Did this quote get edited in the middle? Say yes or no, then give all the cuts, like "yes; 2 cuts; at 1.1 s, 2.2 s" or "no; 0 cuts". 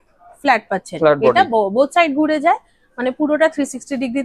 no; 0 cuts